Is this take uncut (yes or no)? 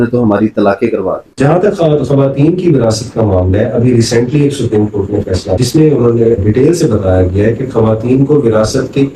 no